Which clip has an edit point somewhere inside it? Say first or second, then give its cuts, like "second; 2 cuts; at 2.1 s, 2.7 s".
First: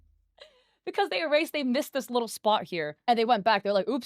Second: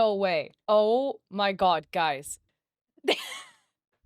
second; 1 cut; at 2.4 s